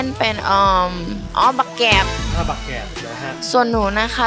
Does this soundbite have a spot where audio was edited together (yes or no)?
no